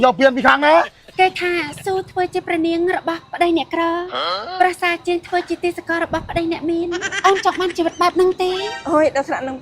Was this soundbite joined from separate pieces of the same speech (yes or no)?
yes